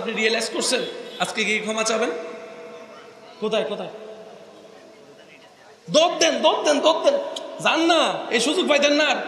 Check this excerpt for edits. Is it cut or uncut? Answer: uncut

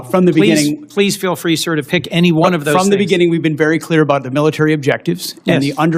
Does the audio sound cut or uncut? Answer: uncut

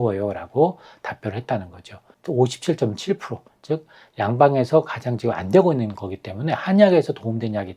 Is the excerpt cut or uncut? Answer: cut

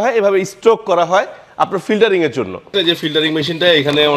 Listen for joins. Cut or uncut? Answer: cut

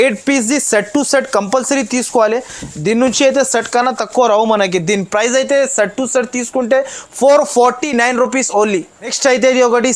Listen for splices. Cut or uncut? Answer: uncut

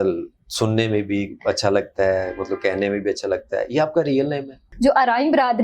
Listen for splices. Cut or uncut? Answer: cut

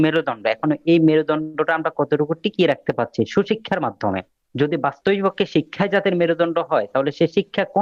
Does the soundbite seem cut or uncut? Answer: uncut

